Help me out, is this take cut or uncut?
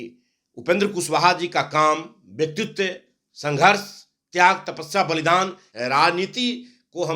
cut